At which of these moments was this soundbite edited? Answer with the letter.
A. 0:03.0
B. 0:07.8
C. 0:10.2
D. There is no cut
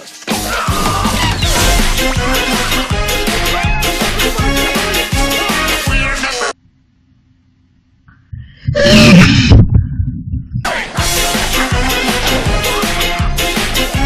A